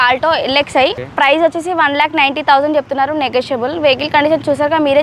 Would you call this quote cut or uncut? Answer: cut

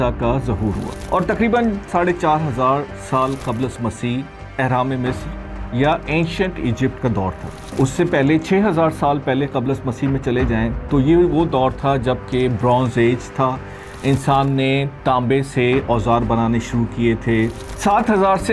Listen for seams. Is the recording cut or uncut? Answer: cut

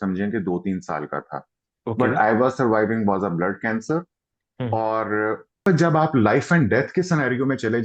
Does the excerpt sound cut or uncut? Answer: cut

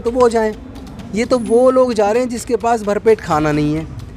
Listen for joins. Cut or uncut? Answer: uncut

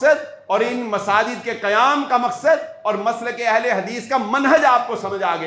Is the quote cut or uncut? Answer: uncut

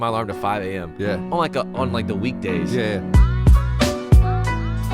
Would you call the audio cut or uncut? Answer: cut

